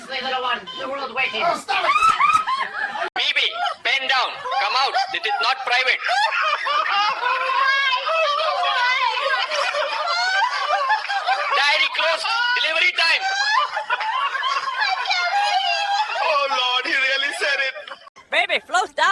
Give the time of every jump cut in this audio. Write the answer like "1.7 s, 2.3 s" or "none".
3.2 s, 18.1 s